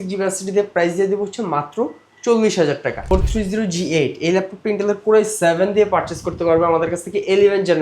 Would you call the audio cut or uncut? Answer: cut